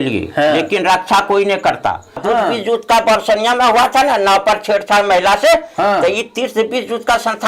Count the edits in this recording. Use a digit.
1